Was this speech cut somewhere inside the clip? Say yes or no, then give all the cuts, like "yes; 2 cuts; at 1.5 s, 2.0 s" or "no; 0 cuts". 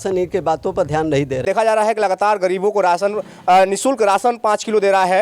yes; 1 cut; at 1.4 s